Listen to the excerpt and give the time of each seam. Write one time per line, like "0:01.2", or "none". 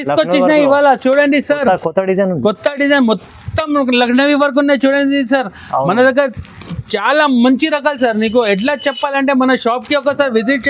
none